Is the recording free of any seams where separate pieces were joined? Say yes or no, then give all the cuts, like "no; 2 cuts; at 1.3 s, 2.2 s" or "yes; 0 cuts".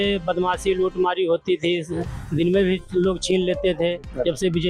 yes; 0 cuts